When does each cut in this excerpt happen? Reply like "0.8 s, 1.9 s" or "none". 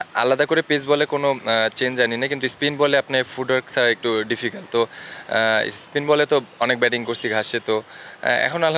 none